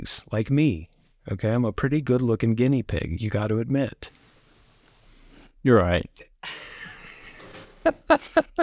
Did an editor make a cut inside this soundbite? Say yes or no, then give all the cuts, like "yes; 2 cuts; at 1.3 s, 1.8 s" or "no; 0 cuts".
no; 0 cuts